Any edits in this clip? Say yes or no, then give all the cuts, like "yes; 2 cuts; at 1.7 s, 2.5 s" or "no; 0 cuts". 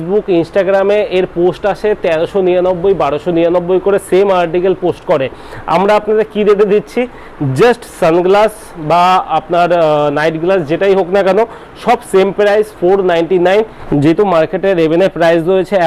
yes; 1 cut; at 13.8 s